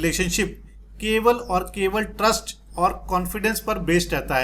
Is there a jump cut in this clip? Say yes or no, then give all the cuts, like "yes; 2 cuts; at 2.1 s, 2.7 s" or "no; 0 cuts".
no; 0 cuts